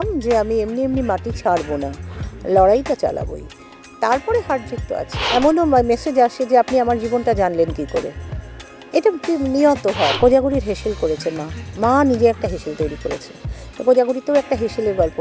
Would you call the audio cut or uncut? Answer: cut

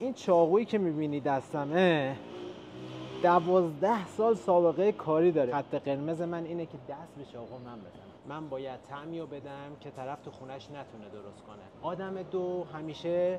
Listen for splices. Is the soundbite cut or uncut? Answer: cut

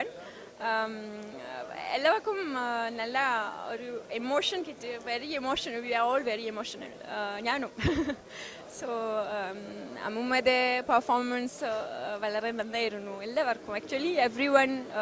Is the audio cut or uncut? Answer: uncut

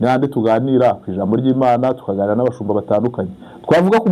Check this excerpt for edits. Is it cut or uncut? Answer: uncut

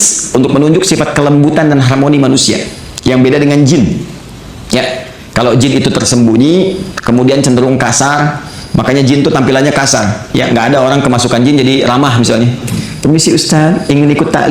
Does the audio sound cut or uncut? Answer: uncut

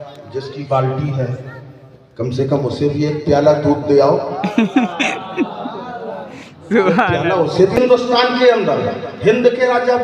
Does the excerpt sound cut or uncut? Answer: cut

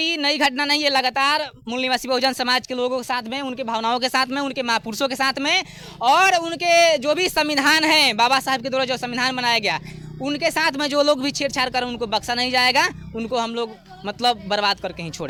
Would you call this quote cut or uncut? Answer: uncut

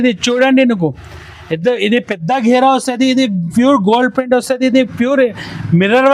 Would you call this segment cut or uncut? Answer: uncut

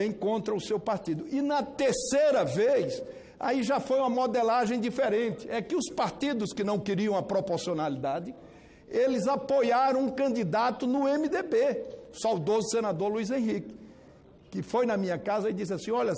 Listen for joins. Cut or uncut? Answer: uncut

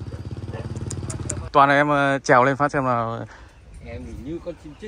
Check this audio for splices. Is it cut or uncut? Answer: cut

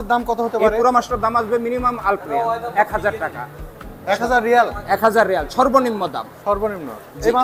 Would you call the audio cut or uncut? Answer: uncut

